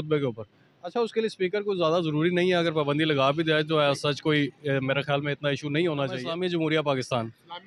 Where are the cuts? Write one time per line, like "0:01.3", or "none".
0:06.3